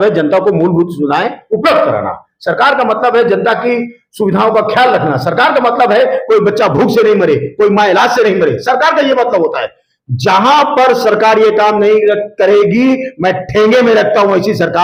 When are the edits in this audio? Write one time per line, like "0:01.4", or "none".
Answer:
none